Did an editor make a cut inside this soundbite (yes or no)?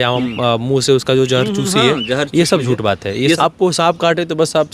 yes